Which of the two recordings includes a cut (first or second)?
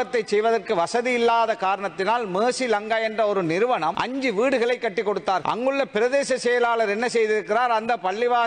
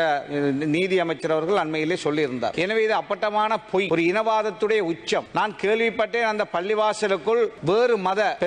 first